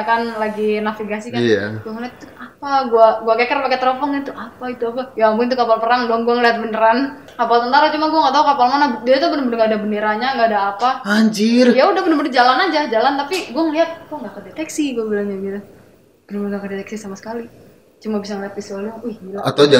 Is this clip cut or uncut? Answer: cut